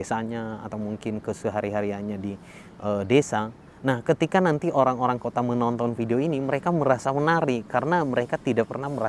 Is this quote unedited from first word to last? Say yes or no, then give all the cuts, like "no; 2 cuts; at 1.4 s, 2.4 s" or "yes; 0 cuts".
yes; 0 cuts